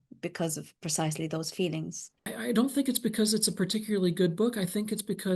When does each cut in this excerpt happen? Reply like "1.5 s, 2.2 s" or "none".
2.3 s